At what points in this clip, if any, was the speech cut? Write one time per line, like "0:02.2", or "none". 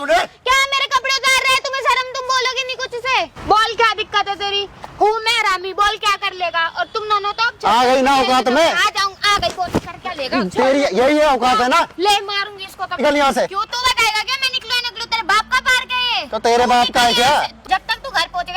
0:03.3
0:13.0
0:17.6